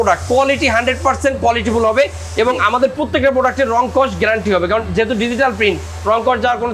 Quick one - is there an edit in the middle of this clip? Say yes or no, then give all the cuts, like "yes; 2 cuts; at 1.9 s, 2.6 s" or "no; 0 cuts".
no; 0 cuts